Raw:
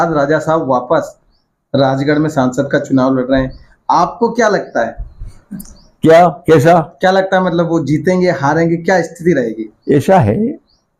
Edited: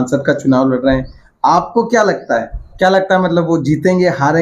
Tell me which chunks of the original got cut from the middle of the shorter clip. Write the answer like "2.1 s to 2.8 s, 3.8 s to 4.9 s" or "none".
5.2 s to 6.9 s